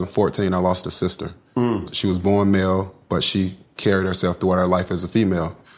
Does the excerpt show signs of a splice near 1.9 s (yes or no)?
yes